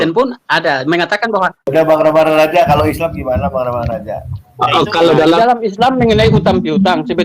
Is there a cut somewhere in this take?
yes; 1 cut; at 1.7 s

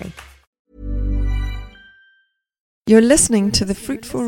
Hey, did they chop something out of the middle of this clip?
yes; 1 cut; at 2.9 s

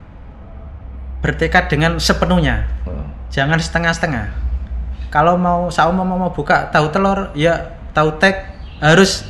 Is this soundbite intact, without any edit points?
yes; 0 cuts

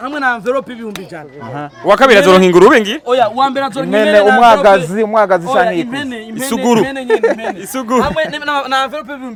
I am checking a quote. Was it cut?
no; 0 cuts

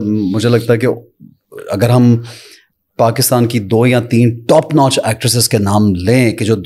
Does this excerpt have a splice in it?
no; 0 cuts

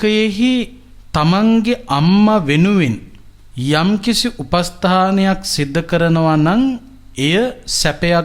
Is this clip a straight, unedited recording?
yes; 0 cuts

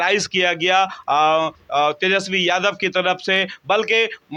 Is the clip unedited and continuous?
yes; 0 cuts

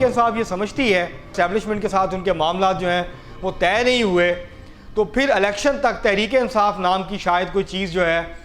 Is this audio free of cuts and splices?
no; 1 cut; at 1.3 s

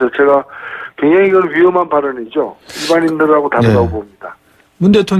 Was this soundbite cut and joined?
yes; 1 cut; at 4.2 s

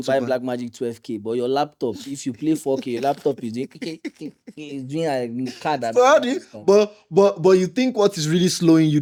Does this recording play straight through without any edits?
yes; 0 cuts

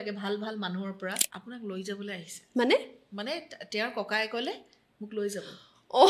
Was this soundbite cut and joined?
yes; 1 cut; at 1.2 s

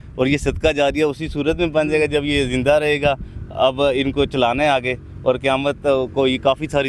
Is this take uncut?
yes; 0 cuts

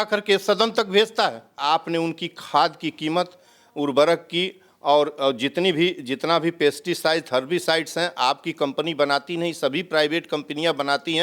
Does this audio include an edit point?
yes; 1 cut; at 1.6 s

